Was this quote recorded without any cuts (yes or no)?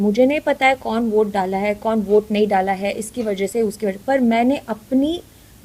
yes